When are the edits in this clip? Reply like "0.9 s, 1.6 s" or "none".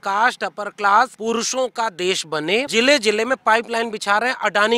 1.2 s, 2.7 s